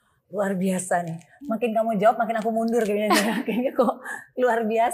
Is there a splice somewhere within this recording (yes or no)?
no